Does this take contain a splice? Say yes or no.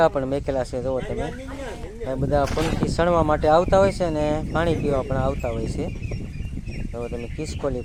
no